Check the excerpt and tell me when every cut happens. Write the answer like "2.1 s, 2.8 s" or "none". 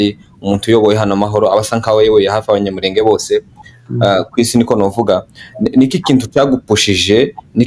none